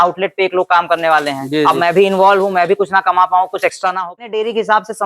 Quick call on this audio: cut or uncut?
cut